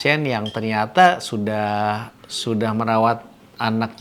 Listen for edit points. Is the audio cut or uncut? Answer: uncut